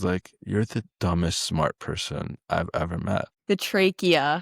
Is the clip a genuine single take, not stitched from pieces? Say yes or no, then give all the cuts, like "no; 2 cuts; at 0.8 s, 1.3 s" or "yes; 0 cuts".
no; 1 cut; at 3.3 s